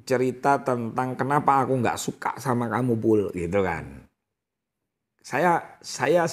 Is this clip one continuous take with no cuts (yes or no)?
yes